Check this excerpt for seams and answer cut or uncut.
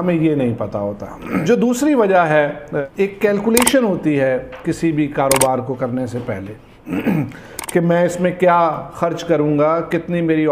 cut